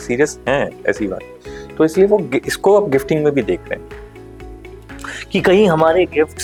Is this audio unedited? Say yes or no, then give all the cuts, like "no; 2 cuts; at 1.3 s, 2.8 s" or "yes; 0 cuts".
yes; 0 cuts